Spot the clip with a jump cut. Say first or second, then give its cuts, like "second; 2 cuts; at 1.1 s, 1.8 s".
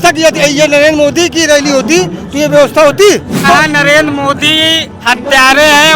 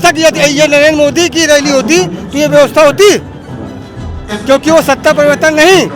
first; 1 cut; at 3.4 s